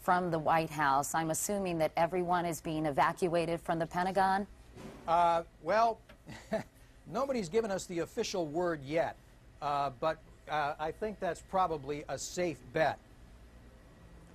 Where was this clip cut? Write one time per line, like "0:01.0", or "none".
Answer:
0:03.6